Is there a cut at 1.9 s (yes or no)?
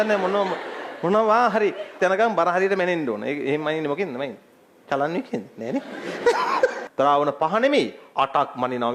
yes